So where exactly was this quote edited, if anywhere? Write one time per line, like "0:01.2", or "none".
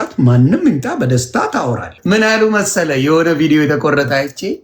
0:01.9